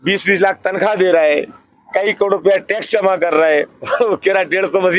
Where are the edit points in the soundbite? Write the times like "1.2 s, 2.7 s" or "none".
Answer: none